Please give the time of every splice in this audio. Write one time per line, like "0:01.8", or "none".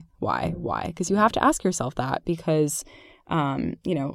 none